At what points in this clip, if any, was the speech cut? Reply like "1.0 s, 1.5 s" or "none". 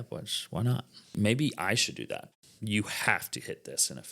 1.1 s, 2.3 s